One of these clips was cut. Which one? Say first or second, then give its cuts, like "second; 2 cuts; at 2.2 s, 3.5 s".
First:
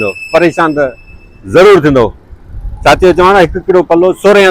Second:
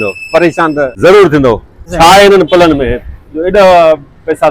second; 2 cuts; at 0.9 s, 1.8 s